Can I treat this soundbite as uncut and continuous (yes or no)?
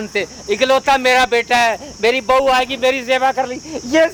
yes